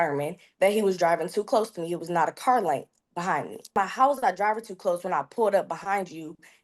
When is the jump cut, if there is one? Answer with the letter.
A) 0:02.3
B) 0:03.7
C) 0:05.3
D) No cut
B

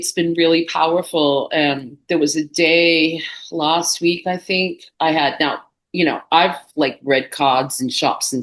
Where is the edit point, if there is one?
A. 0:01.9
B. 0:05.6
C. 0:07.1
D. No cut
D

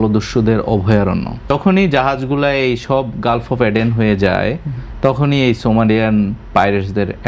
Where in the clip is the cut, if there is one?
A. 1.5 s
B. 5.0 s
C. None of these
A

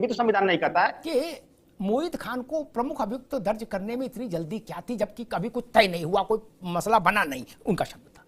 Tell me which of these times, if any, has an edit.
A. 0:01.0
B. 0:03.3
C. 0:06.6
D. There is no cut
A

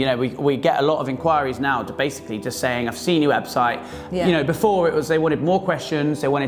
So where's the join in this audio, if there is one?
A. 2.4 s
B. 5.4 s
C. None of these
C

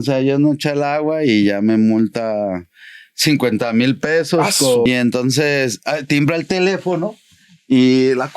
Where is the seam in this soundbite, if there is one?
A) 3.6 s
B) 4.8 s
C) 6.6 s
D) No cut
B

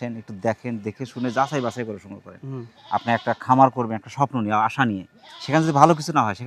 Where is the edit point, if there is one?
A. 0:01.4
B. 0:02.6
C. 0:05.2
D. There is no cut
D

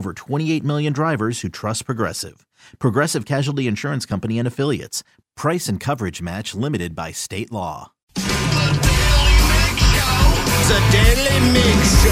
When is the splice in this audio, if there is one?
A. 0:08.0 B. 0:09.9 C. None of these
A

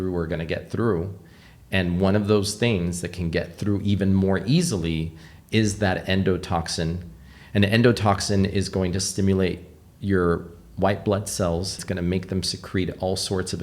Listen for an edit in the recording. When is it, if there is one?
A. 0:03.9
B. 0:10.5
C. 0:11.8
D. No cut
C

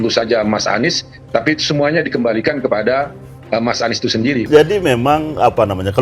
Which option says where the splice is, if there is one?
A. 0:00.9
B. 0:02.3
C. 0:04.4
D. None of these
C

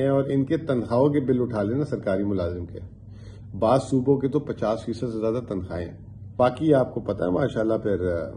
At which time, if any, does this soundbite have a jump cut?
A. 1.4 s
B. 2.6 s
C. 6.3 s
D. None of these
C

